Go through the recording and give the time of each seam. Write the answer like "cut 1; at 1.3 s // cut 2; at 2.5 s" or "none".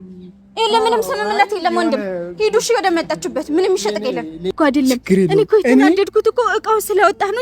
cut 1; at 4.5 s